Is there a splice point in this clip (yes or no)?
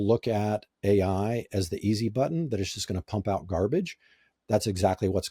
no